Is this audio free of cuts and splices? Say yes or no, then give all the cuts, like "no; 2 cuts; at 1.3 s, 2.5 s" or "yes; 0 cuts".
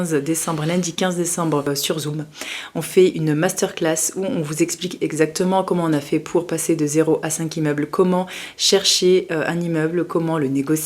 no; 1 cut; at 1.8 s